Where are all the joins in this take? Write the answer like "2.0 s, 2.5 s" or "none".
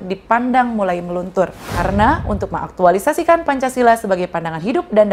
1.6 s